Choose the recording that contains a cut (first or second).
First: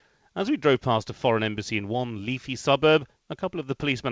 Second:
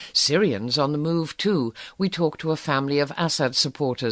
first